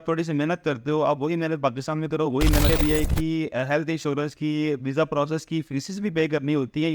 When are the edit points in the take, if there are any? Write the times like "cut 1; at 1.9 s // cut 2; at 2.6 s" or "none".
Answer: cut 1; at 2.7 s